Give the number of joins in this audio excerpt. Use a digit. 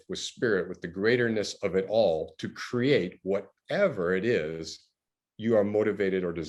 0